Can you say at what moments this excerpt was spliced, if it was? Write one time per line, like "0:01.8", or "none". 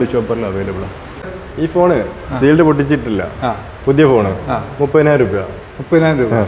0:01.4